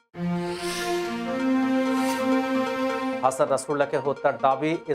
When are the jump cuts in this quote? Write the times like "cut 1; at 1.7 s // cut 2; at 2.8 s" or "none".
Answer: none